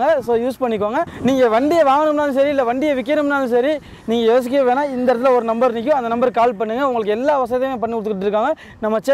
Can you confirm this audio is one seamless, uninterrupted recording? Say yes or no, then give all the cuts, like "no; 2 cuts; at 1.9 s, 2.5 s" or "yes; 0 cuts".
yes; 0 cuts